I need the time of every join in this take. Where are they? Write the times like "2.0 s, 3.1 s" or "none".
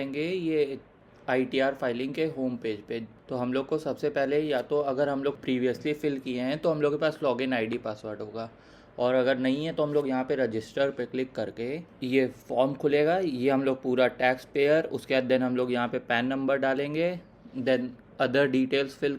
3.2 s, 5.4 s, 11.9 s